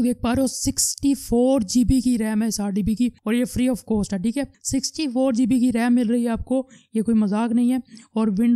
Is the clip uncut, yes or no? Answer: yes